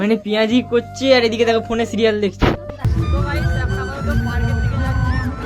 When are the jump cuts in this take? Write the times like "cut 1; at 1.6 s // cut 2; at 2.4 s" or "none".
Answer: cut 1; at 2.8 s

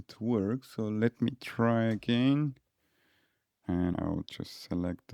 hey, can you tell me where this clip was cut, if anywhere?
cut 1; at 3.9 s

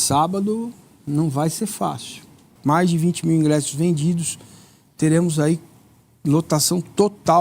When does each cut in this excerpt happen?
cut 1; at 2.5 s

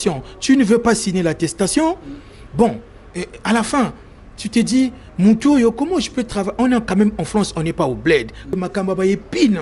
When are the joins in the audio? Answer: cut 1; at 8.6 s

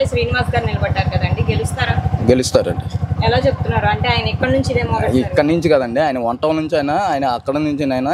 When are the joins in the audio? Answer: none

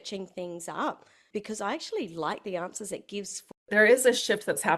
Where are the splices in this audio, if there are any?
cut 1; at 1.1 s // cut 2; at 3.6 s

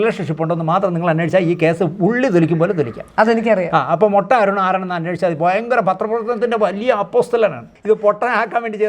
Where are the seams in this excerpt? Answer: cut 1; at 7.7 s

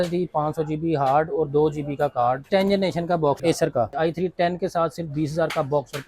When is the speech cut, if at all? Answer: cut 1; at 2.5 s // cut 2; at 3.9 s

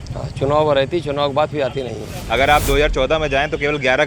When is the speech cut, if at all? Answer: cut 1; at 2.1 s

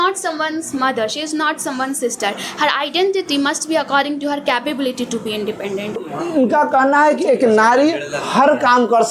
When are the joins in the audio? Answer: cut 1; at 6.1 s

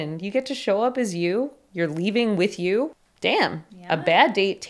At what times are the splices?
cut 1; at 3.0 s

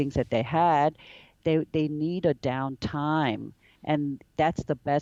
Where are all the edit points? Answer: none

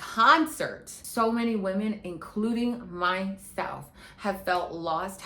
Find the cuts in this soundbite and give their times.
cut 1; at 1.0 s

